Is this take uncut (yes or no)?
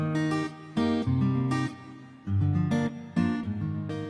yes